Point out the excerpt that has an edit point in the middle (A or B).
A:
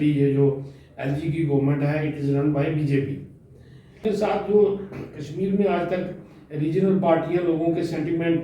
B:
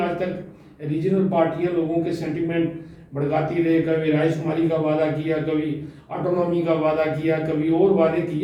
A